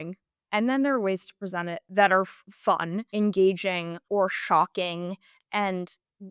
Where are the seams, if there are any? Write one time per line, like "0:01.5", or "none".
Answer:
0:01.8
0:03.0
0:03.9